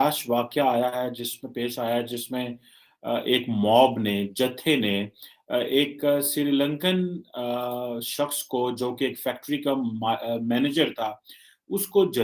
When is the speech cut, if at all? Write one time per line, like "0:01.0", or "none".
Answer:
none